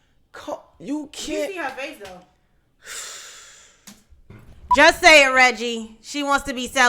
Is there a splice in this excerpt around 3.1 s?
no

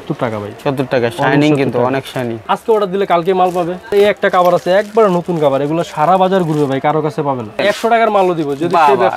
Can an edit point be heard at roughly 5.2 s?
no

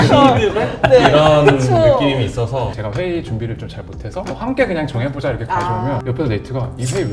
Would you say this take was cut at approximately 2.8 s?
yes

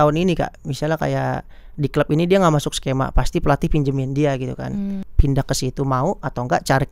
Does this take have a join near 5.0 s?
yes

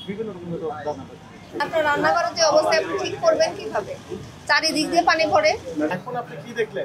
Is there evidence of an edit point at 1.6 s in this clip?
yes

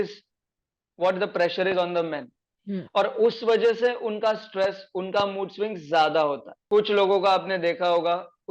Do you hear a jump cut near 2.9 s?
no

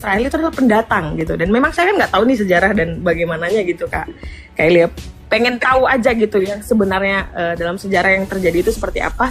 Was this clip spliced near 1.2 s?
no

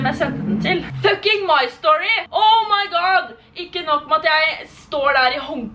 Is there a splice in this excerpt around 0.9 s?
yes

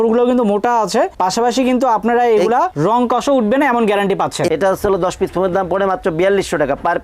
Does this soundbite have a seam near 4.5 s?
yes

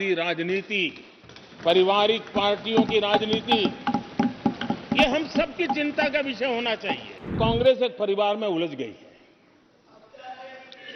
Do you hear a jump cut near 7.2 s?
yes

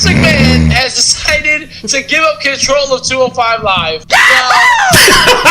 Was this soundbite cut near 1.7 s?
no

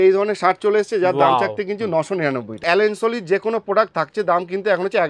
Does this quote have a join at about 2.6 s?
yes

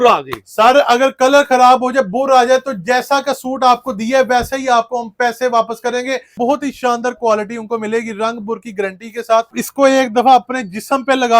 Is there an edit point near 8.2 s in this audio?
no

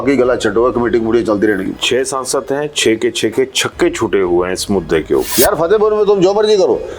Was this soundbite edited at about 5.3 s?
yes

